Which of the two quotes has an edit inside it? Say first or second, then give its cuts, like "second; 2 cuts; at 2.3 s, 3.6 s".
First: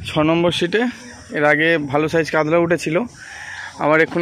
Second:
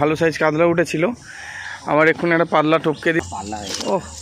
second; 1 cut; at 3.2 s